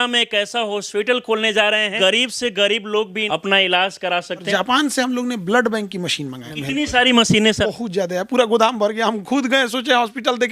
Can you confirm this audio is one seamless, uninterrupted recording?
no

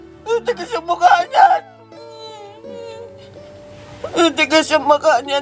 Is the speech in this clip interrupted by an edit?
no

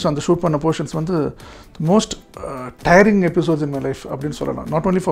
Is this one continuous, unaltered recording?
yes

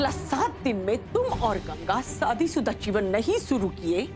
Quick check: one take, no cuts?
yes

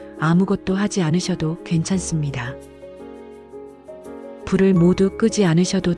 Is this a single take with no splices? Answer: no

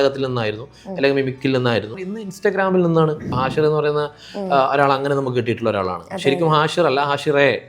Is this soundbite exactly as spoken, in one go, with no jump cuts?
no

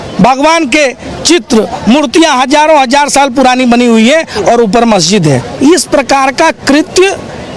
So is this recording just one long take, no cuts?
no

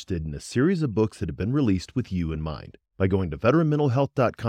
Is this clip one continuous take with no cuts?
yes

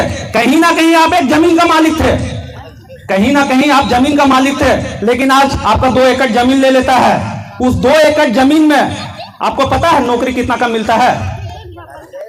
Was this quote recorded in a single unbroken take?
yes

